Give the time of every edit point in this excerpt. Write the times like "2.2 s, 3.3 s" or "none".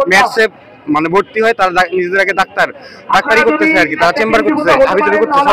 none